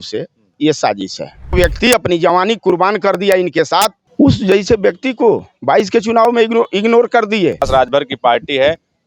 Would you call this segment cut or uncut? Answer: cut